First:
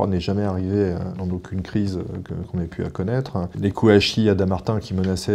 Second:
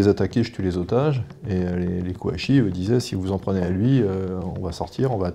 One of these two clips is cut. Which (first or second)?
first